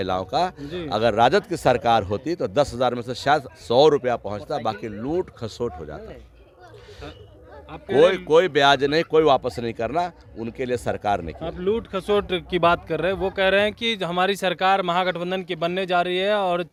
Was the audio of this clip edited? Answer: no; 0 cuts

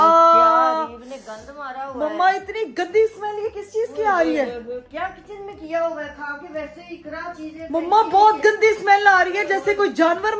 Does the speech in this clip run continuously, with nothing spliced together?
yes; 0 cuts

